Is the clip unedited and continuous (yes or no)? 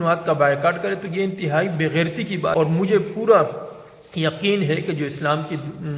no